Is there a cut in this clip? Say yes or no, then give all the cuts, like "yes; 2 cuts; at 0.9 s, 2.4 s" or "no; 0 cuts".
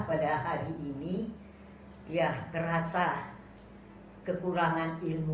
yes; 1 cut; at 2.7 s